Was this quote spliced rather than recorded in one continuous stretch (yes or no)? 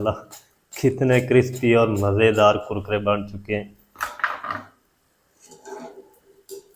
no